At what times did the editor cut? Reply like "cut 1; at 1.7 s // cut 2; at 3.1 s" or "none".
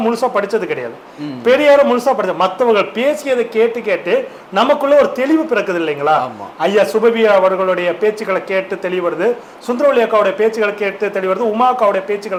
none